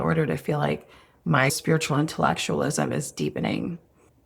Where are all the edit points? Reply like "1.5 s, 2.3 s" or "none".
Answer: 1.5 s